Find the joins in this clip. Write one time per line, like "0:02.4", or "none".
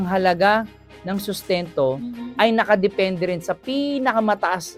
none